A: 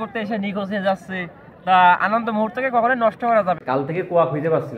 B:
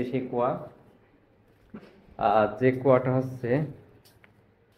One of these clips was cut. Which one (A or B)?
A